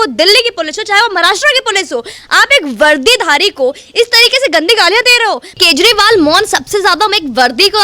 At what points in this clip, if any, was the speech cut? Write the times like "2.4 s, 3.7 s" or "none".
5.5 s